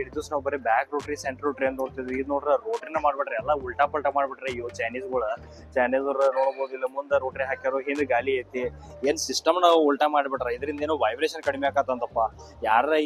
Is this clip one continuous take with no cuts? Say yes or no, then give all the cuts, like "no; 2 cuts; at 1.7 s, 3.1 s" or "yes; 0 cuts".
yes; 0 cuts